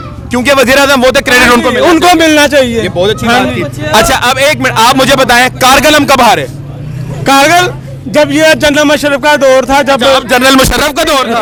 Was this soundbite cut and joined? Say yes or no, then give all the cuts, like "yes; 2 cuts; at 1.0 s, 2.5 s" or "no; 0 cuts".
no; 0 cuts